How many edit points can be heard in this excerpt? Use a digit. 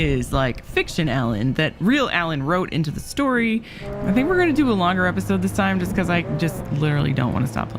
1